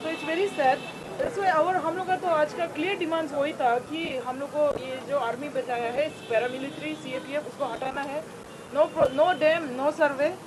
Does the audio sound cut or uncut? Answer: uncut